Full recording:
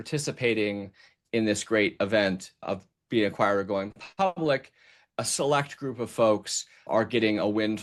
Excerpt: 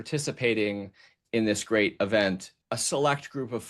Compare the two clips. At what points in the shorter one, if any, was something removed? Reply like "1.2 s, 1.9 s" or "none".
2.5 s

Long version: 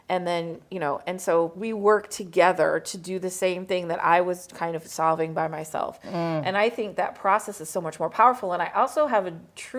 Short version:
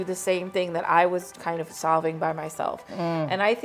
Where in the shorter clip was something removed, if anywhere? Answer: none

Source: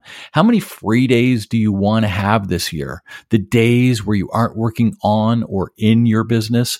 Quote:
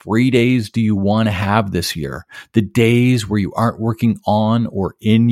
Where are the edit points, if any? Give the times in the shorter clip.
none

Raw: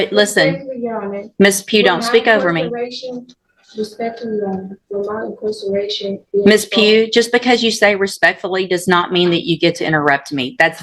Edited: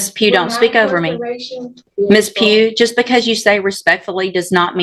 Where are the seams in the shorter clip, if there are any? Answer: 1.8 s

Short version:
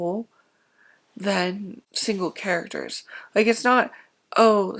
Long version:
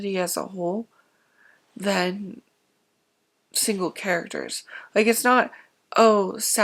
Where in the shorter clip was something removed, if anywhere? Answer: 1.8 s

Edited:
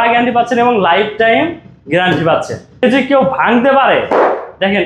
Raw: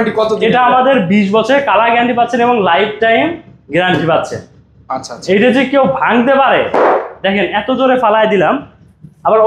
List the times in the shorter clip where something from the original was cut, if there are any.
2.8 s

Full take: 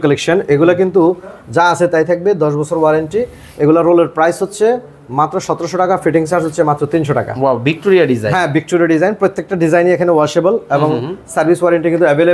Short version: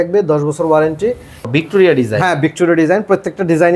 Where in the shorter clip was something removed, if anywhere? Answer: 1.5 s

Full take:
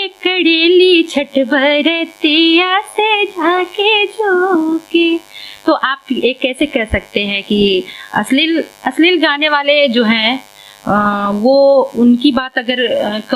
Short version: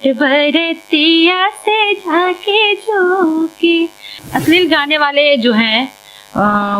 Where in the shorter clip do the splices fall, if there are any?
4.2 s

